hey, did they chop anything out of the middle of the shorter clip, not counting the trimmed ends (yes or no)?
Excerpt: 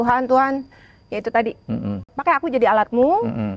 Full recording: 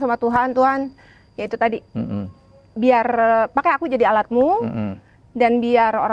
yes